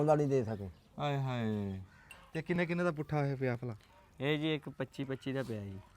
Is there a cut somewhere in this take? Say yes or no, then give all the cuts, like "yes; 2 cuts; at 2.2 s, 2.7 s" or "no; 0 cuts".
yes; 1 cut; at 1.9 s